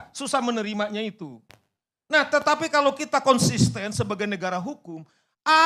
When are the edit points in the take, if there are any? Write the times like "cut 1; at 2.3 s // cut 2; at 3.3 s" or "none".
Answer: none